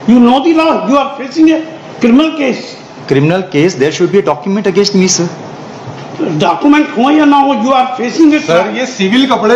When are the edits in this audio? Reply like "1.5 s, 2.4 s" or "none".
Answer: none

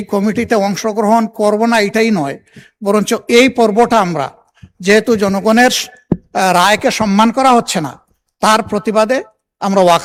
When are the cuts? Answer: none

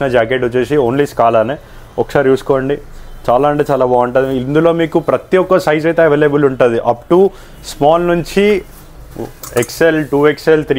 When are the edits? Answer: none

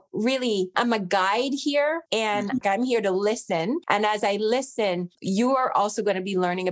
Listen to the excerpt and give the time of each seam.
5.1 s

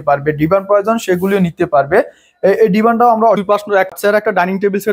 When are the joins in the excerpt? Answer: 3.4 s

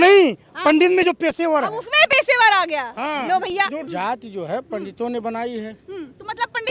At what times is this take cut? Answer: none

